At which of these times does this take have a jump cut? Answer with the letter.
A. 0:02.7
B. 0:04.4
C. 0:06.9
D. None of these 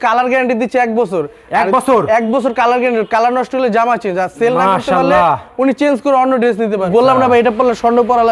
C